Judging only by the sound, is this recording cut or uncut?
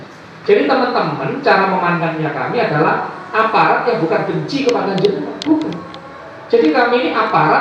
uncut